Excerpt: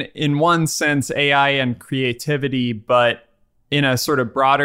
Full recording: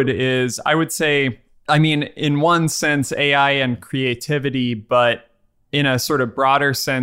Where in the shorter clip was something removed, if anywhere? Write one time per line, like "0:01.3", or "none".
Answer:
none